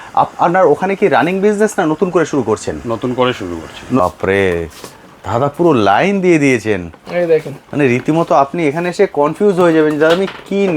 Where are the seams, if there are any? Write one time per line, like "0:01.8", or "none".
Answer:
0:04.0